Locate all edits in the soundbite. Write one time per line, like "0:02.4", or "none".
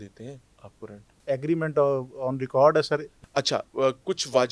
0:01.1
0:03.1

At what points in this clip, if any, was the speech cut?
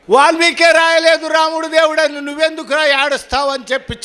none

